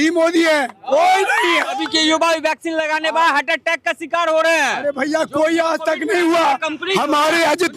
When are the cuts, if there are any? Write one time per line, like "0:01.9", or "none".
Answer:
0:01.8